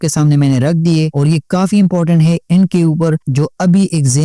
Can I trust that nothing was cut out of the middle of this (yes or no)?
no